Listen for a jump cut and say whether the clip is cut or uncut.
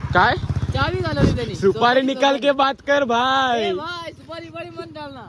uncut